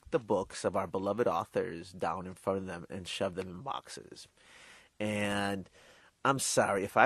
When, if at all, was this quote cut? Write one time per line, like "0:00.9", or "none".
none